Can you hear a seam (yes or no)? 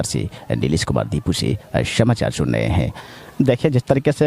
yes